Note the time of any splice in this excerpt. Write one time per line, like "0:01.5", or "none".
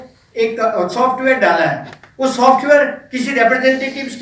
none